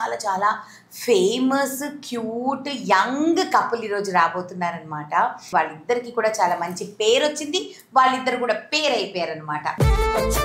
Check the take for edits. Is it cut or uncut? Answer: cut